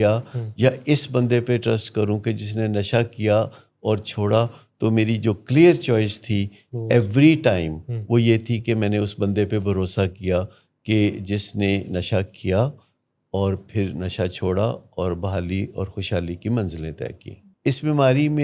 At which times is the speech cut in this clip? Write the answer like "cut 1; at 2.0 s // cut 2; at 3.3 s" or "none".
cut 1; at 17.4 s